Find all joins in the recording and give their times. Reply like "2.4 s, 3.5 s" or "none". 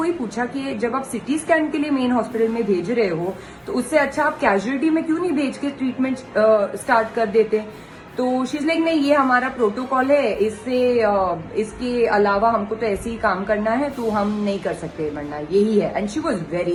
none